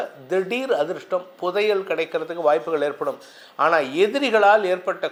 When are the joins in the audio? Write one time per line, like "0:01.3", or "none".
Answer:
none